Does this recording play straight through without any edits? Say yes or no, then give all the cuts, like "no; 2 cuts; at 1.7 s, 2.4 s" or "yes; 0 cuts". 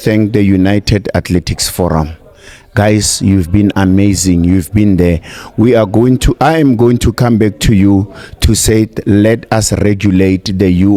yes; 0 cuts